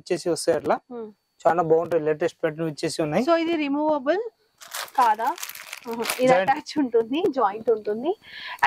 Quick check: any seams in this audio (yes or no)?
no